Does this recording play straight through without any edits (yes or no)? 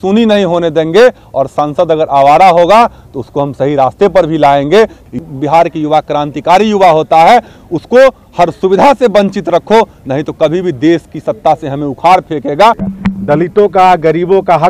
no